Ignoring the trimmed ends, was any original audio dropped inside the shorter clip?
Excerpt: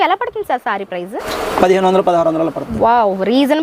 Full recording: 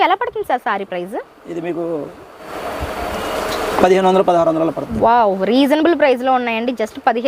yes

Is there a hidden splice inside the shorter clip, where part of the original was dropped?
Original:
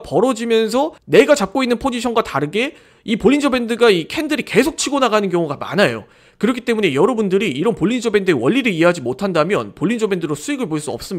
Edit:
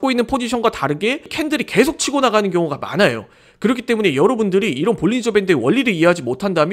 yes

